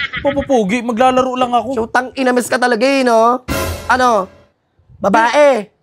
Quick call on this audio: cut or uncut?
uncut